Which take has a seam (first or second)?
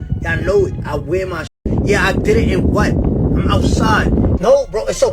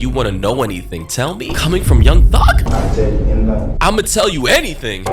first